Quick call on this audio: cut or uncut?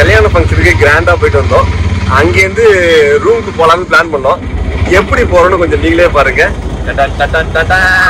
uncut